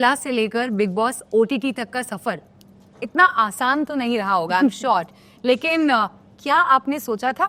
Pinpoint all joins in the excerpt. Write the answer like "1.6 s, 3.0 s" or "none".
none